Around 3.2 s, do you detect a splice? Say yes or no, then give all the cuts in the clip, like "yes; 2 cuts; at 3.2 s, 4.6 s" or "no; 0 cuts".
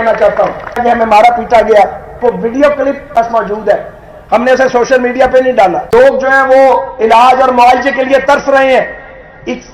yes; 4 cuts; at 0.8 s, 2.1 s, 3.2 s, 5.8 s